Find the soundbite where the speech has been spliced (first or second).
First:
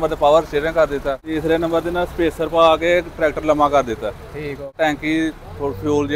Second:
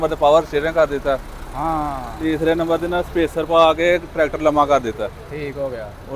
first